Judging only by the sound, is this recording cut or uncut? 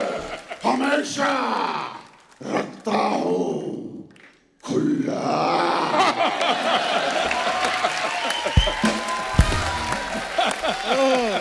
uncut